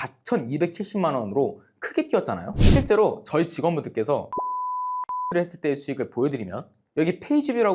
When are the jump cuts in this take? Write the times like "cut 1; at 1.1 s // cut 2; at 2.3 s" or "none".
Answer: cut 1; at 2.5 s